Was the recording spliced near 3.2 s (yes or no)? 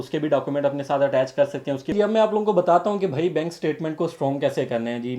no